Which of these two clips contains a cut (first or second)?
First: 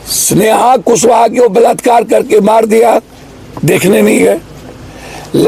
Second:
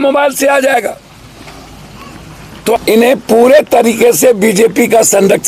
second